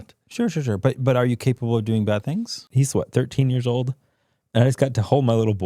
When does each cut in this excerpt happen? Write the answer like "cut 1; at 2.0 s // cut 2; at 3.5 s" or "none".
cut 1; at 2.7 s